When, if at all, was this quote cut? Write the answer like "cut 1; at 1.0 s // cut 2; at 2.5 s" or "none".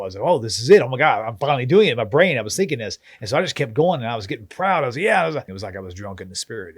cut 1; at 5.6 s

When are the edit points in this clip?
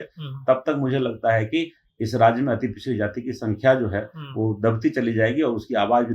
none

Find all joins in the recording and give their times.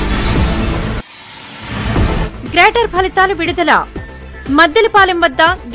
cut 1; at 1.8 s

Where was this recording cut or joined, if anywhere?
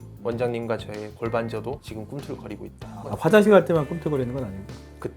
cut 1; at 1.8 s // cut 2; at 3.2 s

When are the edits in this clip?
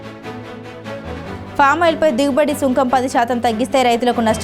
cut 1; at 1.2 s

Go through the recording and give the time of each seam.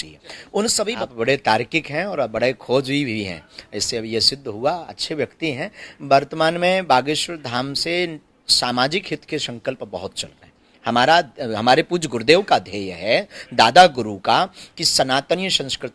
cut 1; at 0.9 s

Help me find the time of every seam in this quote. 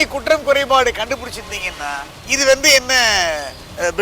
cut 1; at 2.1 s

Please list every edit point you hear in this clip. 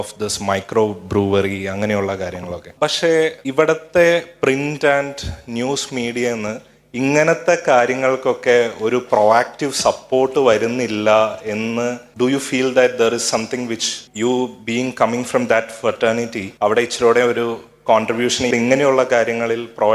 cut 1; at 2.6 s // cut 2; at 3.4 s // cut 3; at 12.0 s // cut 4; at 14.0 s // cut 5; at 16.4 s // cut 6; at 18.5 s

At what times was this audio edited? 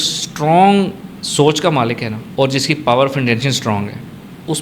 cut 1; at 2.2 s

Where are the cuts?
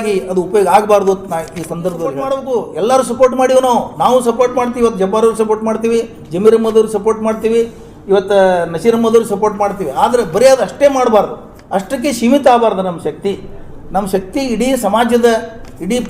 cut 1; at 2.3 s

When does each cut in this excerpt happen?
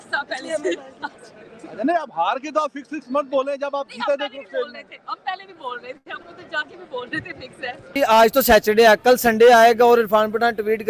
cut 1; at 8.0 s

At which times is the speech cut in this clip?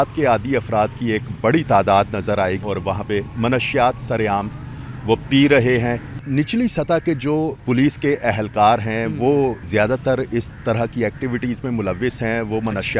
cut 1; at 2.6 s // cut 2; at 6.1 s // cut 3; at 7.6 s // cut 4; at 9.6 s

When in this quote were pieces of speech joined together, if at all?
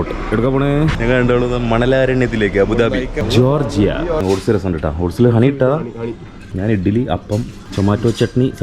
cut 1; at 1.0 s // cut 2; at 3.2 s // cut 3; at 4.2 s // cut 4; at 6.4 s // cut 5; at 7.6 s

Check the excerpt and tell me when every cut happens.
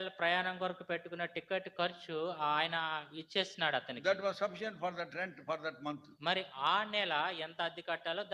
none

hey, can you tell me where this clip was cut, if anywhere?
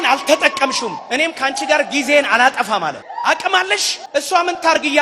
cut 1; at 1.0 s // cut 2; at 3.1 s // cut 3; at 4.0 s

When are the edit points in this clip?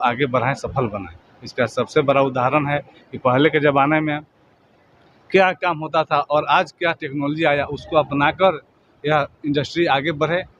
none

